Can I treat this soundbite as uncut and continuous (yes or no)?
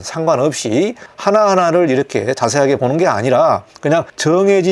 no